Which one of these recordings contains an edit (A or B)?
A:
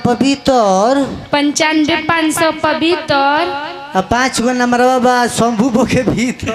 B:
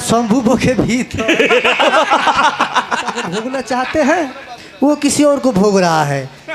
B